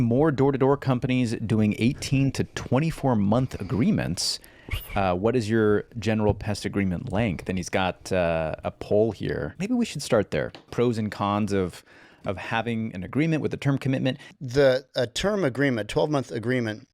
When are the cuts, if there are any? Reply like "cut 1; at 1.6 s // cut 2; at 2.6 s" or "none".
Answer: cut 1; at 9.5 s // cut 2; at 10.6 s // cut 3; at 14.3 s